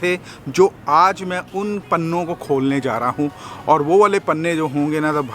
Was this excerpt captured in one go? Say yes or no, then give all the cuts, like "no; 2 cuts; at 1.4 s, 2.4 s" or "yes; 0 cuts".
yes; 0 cuts